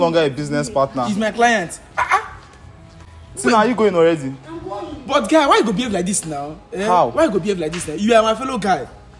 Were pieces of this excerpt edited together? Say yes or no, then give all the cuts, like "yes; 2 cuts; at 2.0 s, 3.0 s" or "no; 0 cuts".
no; 0 cuts